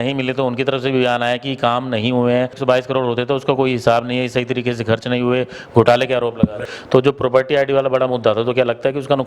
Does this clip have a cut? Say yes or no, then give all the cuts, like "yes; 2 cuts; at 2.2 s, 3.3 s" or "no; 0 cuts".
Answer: yes; 2 cuts; at 2.6 s, 6.7 s